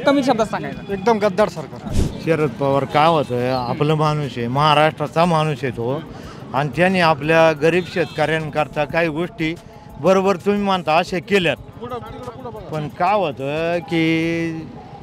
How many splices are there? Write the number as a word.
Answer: zero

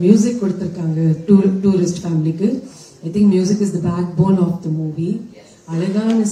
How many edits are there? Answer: zero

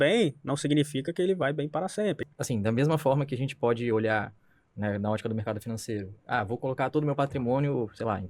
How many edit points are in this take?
one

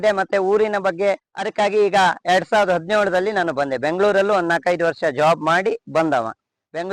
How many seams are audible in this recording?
one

